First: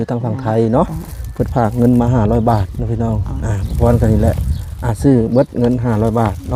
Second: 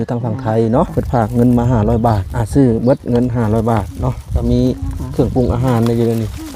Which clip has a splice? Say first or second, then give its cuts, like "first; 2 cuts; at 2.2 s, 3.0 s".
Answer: second; 2 cuts; at 0.9 s, 2.3 s